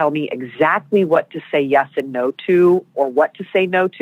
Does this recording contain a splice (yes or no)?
yes